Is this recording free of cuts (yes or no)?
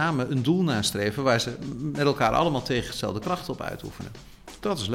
yes